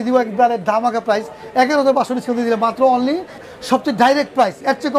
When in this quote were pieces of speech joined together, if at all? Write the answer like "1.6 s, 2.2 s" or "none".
3.4 s

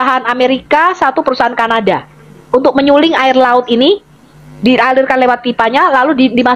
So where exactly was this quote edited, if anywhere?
none

